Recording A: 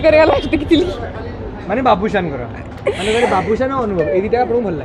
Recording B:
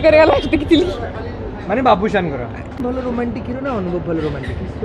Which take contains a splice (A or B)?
B